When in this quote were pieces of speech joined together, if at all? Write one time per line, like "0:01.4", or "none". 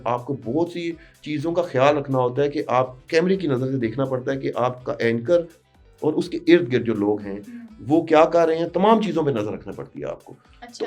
none